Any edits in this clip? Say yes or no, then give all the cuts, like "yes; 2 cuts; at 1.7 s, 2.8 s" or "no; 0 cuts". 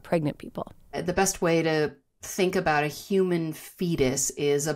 yes; 1 cut; at 1.0 s